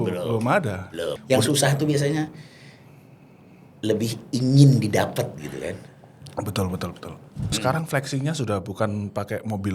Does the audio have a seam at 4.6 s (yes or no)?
no